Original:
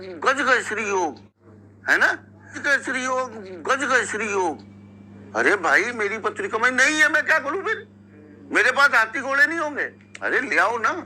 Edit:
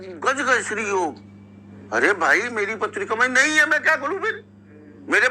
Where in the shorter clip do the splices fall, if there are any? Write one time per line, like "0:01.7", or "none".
0:01.2